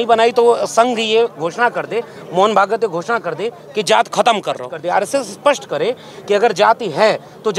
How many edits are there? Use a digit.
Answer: 1